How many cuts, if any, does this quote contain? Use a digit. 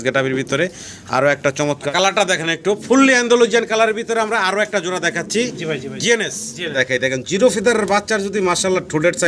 2